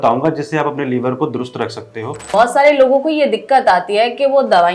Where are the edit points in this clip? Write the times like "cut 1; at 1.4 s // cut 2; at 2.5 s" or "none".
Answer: cut 1; at 2.2 s